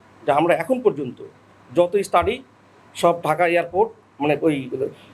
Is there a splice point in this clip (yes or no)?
no